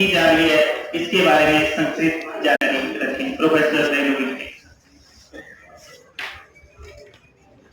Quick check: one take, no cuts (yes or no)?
no